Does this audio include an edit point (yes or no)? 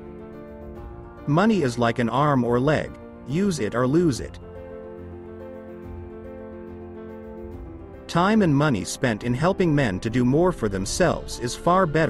yes